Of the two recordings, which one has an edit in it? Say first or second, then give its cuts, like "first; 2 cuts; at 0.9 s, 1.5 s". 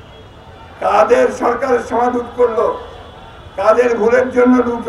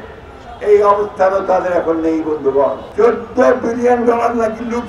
second; 1 cut; at 2.8 s